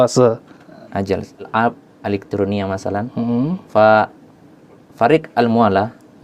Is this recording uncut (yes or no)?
no